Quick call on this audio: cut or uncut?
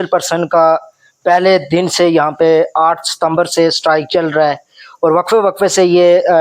uncut